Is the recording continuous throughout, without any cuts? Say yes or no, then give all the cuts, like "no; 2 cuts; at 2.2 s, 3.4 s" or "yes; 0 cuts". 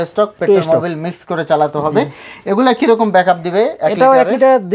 yes; 0 cuts